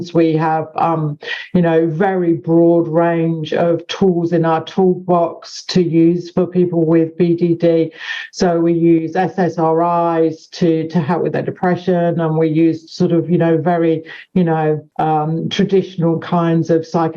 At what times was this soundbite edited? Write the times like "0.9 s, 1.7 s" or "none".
none